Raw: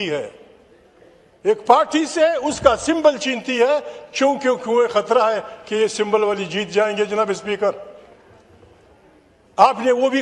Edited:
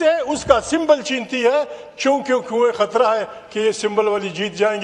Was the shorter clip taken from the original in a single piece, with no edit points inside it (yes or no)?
yes